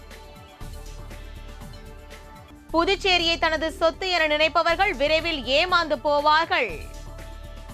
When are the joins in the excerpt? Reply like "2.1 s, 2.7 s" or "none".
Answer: 2.5 s